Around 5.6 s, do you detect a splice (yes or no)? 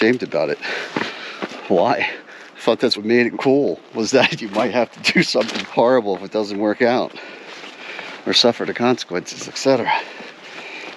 yes